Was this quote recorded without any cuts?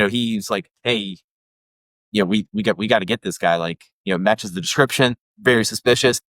no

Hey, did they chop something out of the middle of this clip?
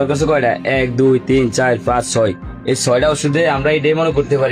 no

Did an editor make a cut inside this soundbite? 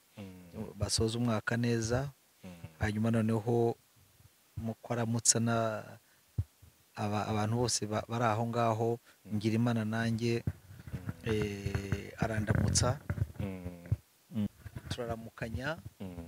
yes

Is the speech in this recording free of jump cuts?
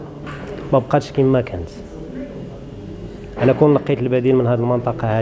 yes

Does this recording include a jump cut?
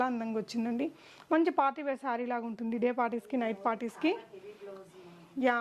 no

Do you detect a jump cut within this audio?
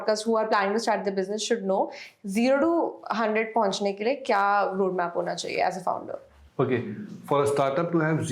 no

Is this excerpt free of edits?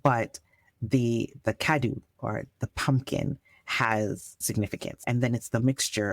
no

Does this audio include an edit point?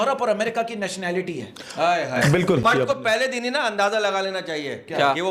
yes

